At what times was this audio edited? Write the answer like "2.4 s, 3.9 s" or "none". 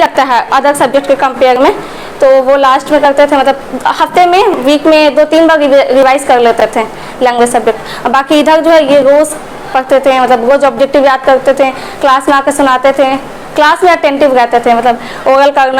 none